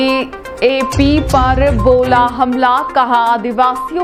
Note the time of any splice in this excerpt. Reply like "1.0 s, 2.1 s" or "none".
none